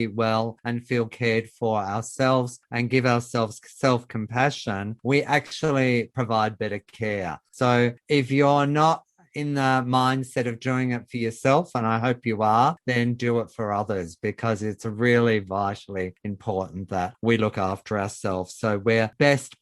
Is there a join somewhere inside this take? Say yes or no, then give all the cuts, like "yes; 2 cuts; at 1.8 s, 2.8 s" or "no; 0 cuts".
yes; 1 cut; at 7.4 s